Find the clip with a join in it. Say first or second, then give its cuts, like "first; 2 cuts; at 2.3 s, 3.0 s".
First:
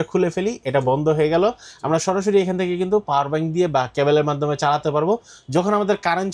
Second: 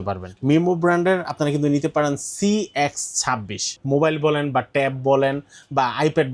second; 1 cut; at 3.8 s